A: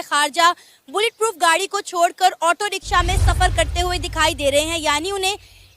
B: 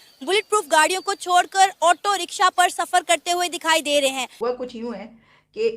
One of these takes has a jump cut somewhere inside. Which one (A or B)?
B